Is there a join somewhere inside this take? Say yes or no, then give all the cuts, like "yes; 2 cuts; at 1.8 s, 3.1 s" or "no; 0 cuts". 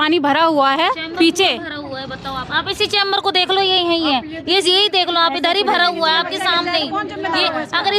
no; 0 cuts